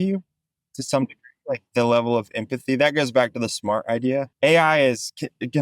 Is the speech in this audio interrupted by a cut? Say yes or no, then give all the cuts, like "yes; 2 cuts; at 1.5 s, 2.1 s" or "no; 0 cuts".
yes; 1 cut; at 4.3 s